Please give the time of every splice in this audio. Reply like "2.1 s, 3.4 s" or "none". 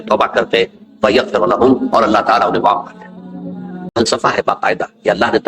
3.9 s